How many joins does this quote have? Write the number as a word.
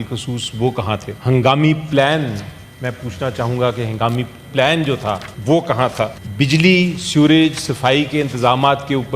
three